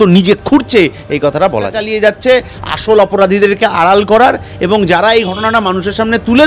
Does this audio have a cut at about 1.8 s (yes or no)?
yes